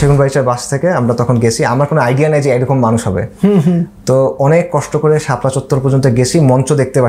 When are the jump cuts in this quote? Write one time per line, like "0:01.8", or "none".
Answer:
none